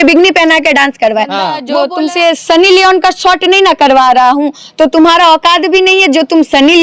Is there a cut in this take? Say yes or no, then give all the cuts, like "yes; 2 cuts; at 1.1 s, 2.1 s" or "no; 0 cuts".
yes; 1 cut; at 1.6 s